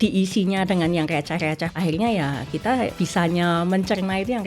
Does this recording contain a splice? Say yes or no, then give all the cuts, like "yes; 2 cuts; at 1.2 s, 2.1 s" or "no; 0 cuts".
yes; 2 cuts; at 1.7 s, 2.9 s